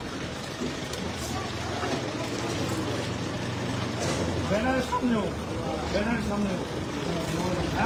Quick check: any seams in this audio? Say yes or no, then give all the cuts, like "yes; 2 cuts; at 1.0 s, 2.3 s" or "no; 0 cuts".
no; 0 cuts